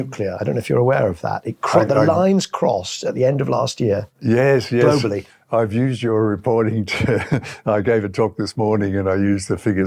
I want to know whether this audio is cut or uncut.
uncut